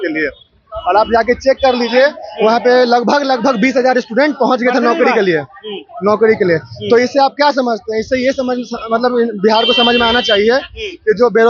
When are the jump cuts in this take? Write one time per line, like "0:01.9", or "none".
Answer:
none